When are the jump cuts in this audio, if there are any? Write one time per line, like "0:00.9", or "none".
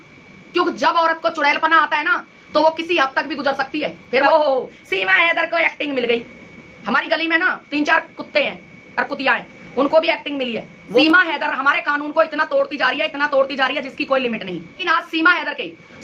0:04.2
0:11.0
0:14.8